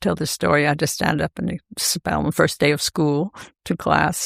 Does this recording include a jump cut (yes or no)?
no